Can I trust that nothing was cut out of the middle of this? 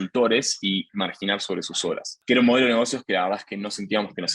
no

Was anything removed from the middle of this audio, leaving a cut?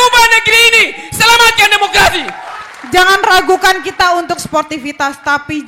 yes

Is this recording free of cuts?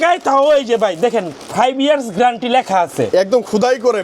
yes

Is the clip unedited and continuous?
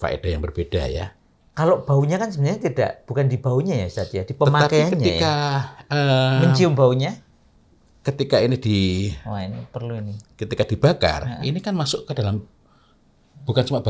yes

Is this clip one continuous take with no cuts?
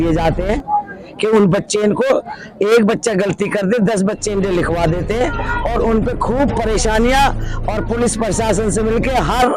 yes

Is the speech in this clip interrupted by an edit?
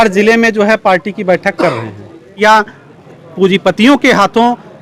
yes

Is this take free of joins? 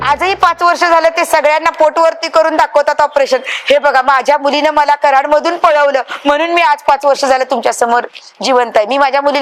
yes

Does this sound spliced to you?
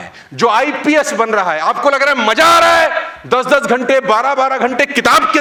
no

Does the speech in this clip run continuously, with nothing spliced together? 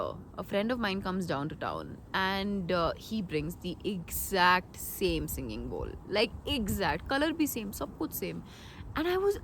yes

